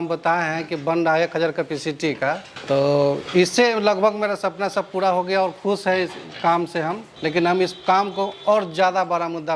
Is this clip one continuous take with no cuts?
yes; 0 cuts

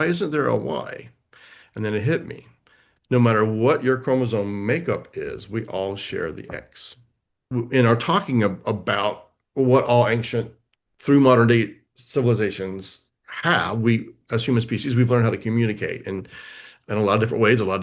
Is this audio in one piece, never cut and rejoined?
no; 1 cut; at 7.4 s

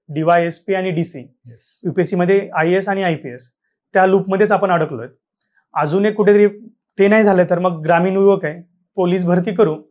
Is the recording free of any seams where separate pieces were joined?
yes; 0 cuts

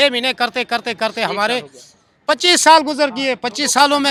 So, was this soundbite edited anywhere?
no; 0 cuts

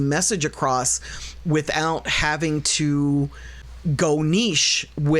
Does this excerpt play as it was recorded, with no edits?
no; 1 cut; at 3.7 s

